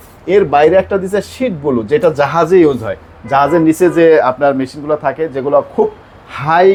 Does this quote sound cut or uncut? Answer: uncut